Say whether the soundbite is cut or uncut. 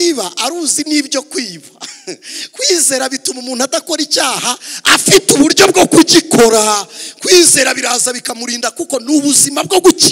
uncut